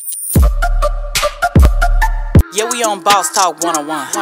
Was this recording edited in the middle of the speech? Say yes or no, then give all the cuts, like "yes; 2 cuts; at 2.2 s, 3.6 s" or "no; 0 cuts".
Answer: no; 0 cuts